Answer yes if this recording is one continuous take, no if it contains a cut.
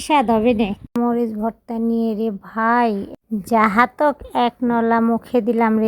no